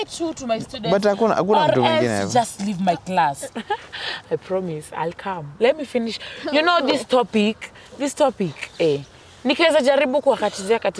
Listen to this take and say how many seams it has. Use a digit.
1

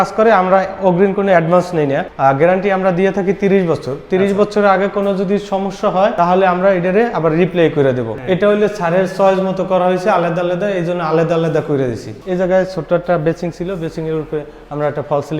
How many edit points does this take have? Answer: 4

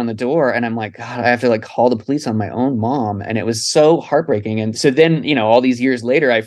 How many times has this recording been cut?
1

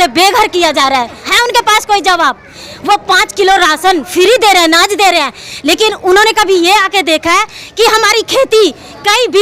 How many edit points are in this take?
1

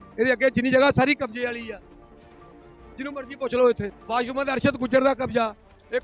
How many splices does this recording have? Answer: 1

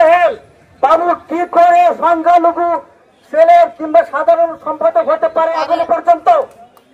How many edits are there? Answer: 0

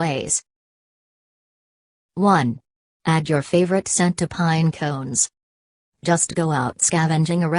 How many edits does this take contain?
1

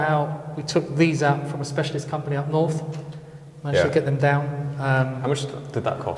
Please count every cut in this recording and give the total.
0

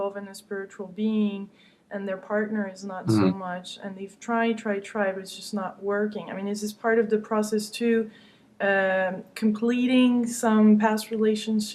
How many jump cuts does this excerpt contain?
1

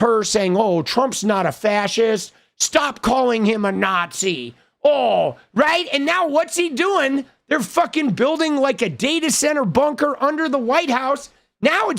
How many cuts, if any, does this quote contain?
0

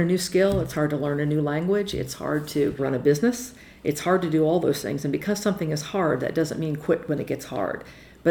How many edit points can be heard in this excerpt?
0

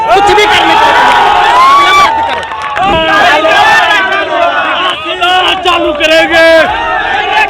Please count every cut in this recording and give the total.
1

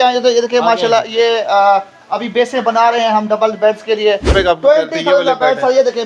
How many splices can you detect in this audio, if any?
1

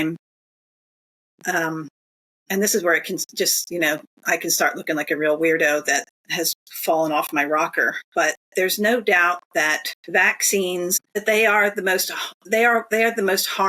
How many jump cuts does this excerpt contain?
4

